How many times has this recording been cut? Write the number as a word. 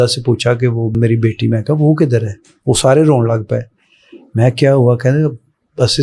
one